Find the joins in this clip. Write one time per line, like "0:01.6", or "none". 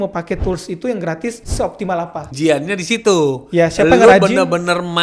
0:01.7